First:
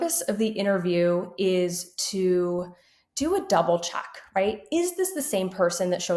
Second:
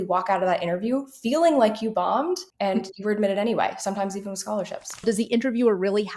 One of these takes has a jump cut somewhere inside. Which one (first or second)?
second